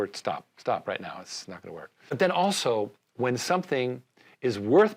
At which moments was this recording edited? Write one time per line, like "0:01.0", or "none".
0:02.1